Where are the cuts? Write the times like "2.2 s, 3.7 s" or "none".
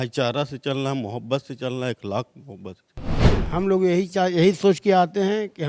3.2 s